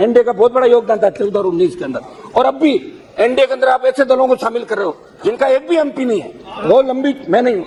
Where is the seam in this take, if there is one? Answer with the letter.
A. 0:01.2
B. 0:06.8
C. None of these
C